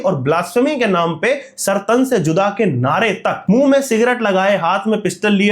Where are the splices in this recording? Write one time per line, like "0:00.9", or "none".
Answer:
0:03.4